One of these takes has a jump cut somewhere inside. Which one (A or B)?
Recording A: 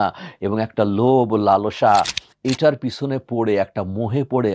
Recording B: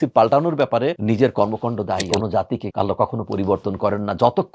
B